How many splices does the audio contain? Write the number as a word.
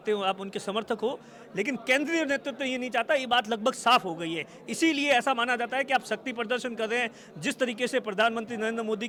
zero